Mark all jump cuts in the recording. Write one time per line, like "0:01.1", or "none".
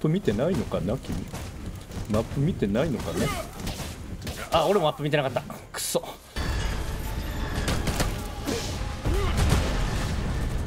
none